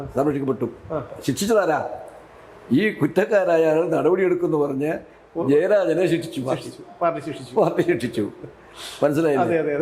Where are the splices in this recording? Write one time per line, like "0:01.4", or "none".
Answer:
none